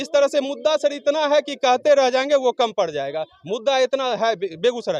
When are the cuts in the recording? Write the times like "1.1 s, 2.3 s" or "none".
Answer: none